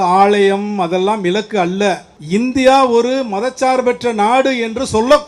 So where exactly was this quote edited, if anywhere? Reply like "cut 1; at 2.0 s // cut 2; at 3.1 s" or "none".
cut 1; at 2.1 s